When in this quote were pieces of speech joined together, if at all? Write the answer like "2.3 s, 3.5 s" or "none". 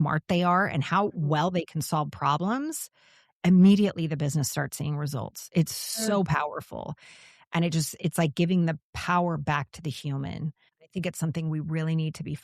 10.8 s